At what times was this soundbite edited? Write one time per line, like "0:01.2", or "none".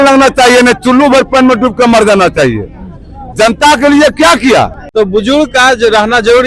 0:04.8